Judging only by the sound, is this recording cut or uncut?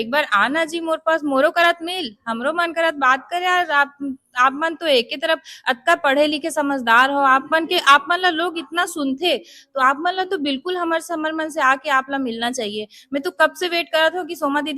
uncut